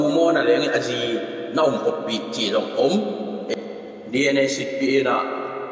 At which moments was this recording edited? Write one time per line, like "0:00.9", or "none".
none